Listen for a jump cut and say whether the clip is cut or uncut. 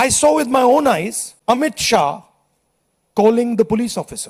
cut